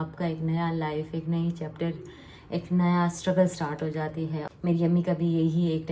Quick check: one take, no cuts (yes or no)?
no